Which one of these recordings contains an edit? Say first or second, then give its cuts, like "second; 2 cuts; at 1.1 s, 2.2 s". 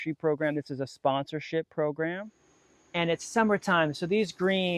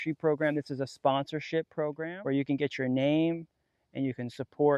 first; 1 cut; at 2.2 s